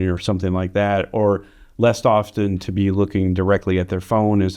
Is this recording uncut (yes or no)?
yes